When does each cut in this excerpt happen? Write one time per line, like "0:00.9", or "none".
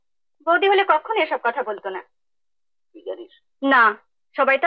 none